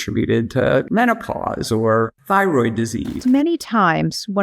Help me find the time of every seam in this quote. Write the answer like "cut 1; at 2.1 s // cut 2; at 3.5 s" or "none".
cut 1; at 0.9 s // cut 2; at 2.2 s // cut 3; at 3.2 s